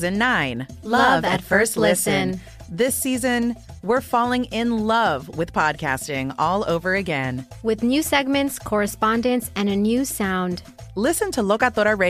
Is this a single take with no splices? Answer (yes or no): yes